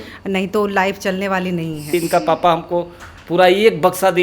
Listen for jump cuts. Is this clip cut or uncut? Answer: cut